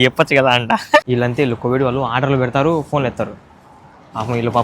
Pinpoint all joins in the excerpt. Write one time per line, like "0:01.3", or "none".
0:01.0